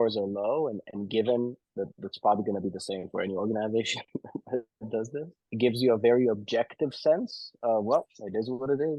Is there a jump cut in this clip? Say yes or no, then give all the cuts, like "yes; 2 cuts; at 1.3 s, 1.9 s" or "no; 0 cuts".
no; 0 cuts